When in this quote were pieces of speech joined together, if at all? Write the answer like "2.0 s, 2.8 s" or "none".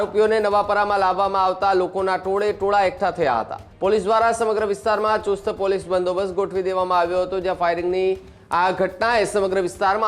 3.6 s